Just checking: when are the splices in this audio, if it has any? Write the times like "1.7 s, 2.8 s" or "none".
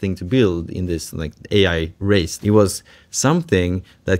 2.3 s